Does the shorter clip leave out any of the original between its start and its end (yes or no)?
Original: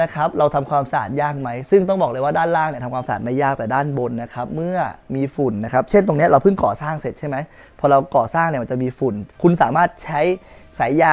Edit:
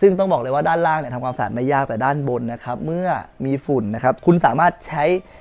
yes